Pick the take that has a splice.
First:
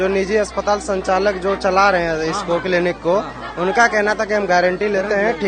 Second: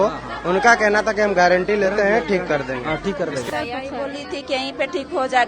second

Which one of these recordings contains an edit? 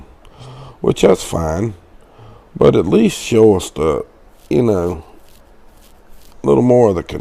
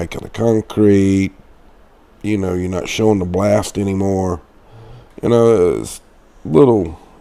second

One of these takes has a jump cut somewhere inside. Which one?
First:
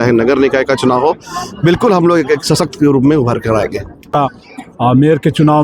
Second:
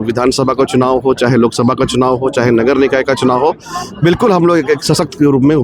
first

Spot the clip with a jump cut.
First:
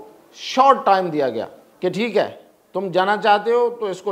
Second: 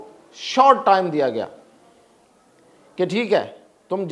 first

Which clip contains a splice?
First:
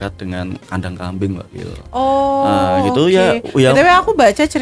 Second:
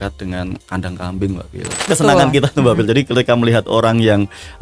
second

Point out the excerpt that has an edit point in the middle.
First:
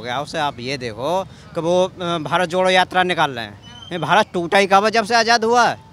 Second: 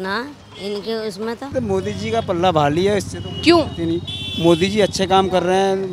second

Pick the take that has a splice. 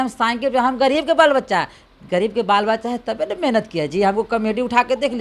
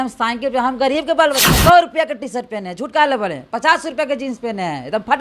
second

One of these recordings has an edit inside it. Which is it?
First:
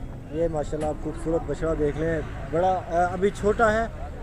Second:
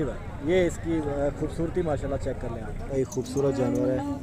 second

